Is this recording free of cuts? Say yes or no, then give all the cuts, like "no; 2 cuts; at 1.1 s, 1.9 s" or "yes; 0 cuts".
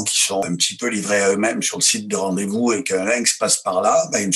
yes; 0 cuts